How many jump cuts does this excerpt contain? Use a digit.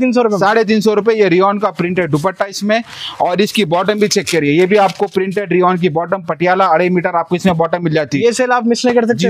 0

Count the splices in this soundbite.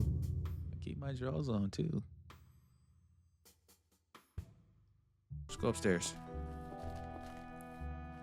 1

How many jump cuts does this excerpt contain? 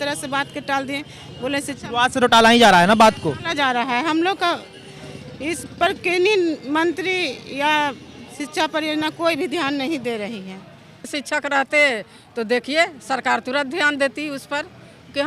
1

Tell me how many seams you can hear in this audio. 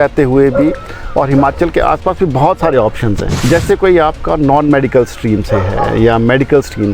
1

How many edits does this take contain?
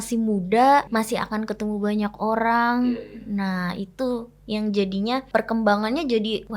2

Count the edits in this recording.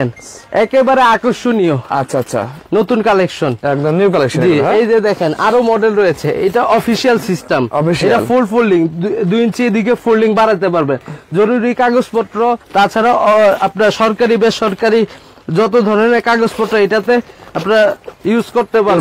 0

